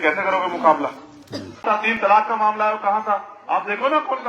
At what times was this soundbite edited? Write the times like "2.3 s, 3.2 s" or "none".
1.6 s